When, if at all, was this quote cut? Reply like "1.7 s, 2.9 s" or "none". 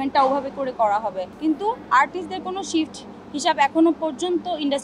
1.3 s